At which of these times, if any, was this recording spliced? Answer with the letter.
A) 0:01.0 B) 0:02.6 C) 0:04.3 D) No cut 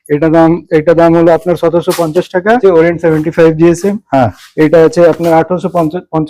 B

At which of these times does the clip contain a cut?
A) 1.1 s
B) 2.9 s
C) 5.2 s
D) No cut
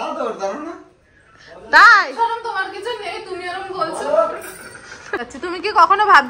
C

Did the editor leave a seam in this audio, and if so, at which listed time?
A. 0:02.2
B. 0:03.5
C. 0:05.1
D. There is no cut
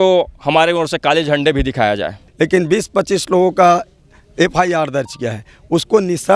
A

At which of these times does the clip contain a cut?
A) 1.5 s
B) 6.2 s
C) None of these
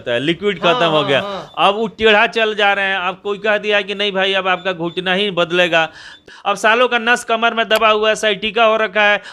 B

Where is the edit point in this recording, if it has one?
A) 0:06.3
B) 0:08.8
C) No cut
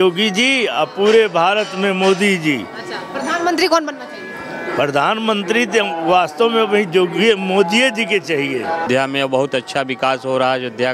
B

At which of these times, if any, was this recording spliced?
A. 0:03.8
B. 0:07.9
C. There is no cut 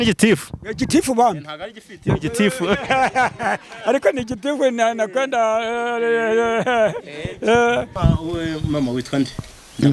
B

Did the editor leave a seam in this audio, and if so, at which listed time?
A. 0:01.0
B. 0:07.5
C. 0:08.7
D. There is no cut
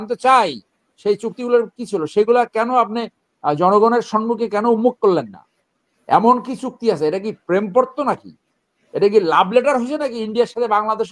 D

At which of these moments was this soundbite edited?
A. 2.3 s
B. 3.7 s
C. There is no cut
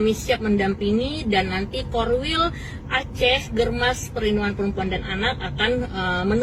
C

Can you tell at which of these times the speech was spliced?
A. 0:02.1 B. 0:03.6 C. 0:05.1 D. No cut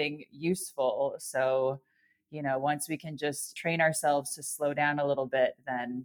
B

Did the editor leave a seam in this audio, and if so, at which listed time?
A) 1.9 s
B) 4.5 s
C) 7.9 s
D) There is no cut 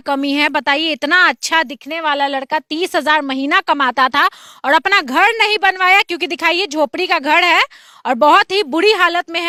D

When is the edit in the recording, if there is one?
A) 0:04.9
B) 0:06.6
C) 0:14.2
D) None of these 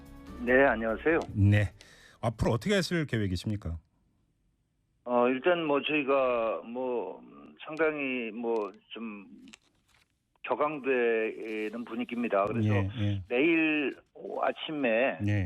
B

